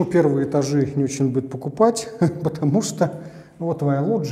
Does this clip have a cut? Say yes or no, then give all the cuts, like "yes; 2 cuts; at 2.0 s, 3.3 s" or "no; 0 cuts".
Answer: no; 0 cuts